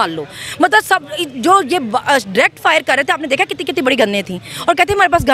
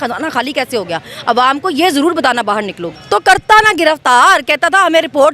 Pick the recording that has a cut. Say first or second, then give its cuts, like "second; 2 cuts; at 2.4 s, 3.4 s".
second; 1 cut; at 2.9 s